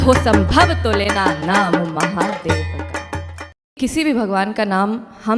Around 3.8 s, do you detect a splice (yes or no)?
yes